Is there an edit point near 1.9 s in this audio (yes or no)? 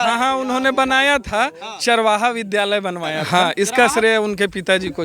no